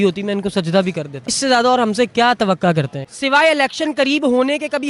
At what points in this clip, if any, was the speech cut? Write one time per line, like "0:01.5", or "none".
0:01.2
0:03.0